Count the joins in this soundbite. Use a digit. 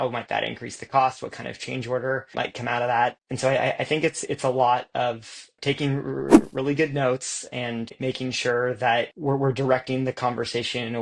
4